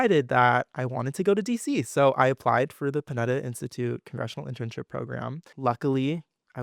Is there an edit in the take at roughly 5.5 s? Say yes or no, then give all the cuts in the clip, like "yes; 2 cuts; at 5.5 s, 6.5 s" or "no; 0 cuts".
yes; 1 cut; at 5.5 s